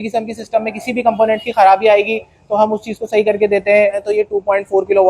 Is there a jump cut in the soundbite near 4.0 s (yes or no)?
yes